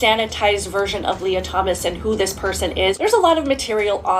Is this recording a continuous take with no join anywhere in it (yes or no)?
no